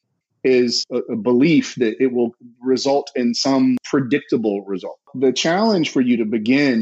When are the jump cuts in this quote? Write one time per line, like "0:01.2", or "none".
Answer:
0:00.8
0:03.8
0:05.1